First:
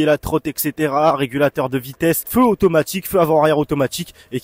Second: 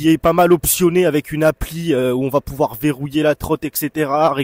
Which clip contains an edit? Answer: first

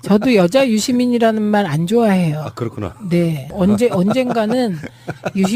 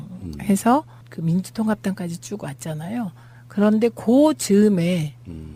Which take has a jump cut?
first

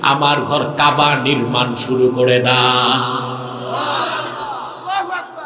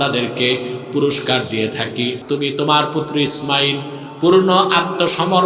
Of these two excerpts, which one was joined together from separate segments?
second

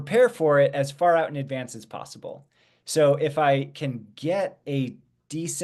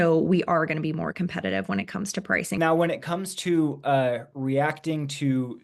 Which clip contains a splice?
second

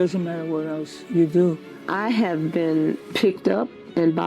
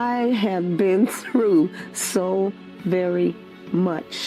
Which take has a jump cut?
first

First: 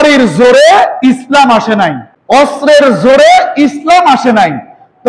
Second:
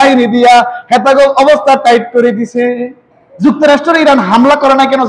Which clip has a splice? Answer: first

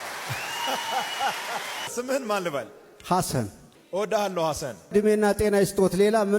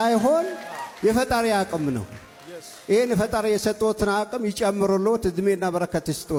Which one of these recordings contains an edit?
first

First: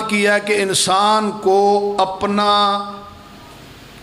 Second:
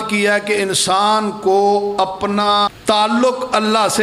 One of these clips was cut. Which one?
second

